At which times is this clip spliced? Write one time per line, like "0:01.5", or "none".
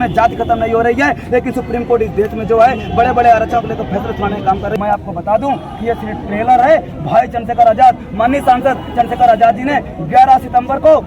0:04.8